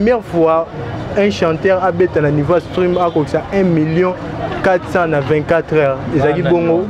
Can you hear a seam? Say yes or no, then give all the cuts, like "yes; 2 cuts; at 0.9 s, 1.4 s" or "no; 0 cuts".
no; 0 cuts